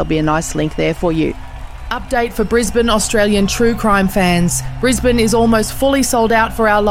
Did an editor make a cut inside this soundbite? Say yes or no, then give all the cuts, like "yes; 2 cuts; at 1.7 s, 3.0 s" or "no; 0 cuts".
no; 0 cuts